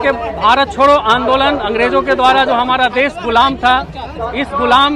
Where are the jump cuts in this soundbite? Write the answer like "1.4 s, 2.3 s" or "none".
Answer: none

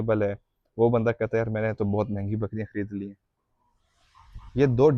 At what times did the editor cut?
none

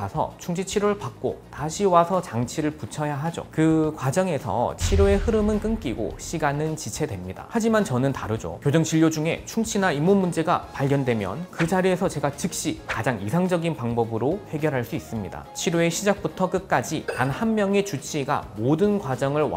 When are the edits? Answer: 15.4 s

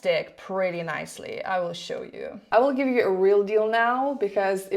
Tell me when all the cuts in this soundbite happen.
2.5 s

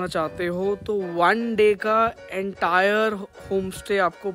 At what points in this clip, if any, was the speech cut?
none

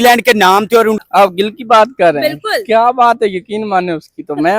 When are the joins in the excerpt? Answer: 1.0 s

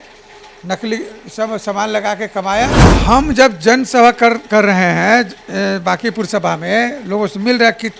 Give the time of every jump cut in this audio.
2.9 s

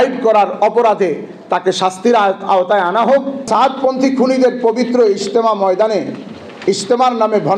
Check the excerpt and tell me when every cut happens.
3.4 s

